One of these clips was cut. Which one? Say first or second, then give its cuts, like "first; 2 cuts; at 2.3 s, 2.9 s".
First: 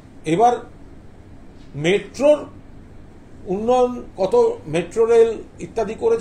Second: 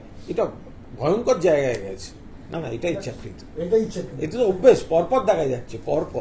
second; 1 cut; at 2.2 s